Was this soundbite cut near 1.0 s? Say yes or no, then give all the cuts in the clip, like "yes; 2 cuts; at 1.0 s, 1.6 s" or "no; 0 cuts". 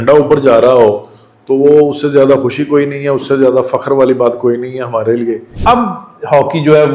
no; 1 cut; at 5.5 s